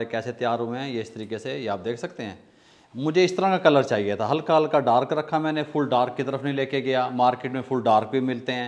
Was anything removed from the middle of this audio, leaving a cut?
no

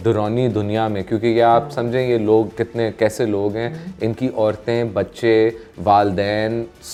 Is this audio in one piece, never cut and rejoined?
yes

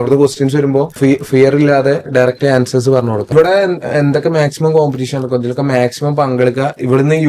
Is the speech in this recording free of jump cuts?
no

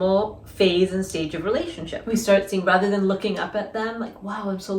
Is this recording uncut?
no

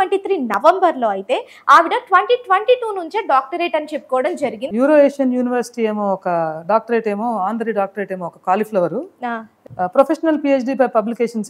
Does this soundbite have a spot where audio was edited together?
yes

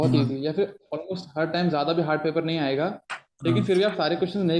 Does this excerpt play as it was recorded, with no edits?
yes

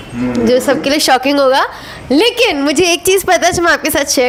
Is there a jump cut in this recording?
no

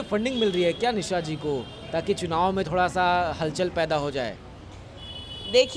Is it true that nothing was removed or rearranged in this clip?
yes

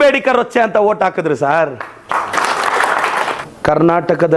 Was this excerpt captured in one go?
yes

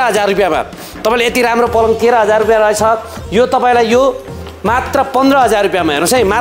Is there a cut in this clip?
no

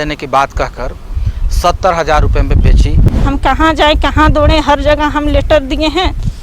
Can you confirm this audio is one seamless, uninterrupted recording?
no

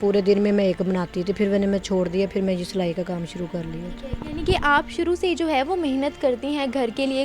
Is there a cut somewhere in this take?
no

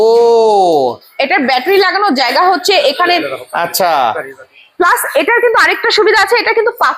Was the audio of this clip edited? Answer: no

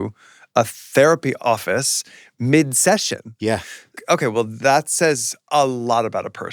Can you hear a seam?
yes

